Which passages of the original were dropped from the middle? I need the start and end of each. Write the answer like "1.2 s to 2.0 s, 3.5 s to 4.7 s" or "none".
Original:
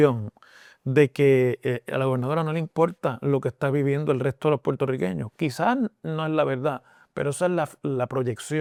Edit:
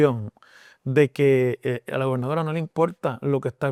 none

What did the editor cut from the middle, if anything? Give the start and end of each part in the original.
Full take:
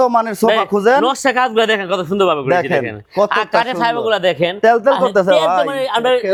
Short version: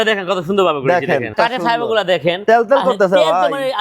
2.9 s to 3.5 s

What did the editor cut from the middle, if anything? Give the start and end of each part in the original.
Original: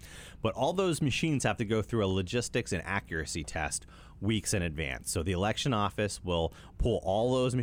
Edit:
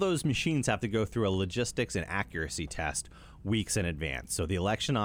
none

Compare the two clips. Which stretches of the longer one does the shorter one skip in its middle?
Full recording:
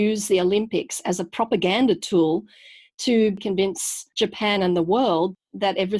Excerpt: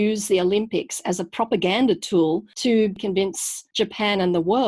3.0 s to 3.4 s

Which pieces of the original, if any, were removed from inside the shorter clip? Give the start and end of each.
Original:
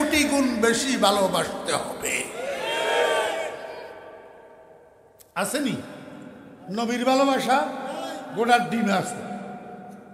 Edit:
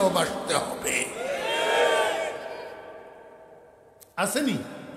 none

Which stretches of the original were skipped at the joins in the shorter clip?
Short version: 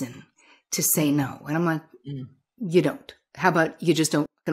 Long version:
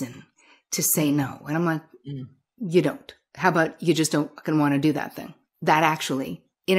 none

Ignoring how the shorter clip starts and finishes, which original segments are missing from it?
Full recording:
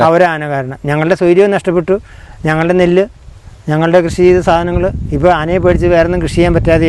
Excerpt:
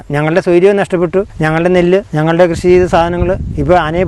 2.1 s to 2.4 s, 3.1 s to 3.6 s

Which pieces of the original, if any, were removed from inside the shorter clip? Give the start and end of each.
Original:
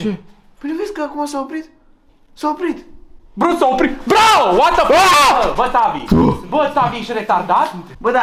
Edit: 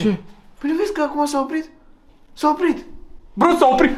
none

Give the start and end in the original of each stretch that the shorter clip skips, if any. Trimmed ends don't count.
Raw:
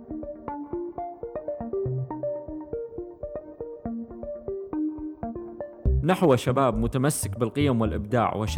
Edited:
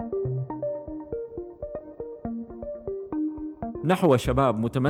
5.4 s to 6.0 s

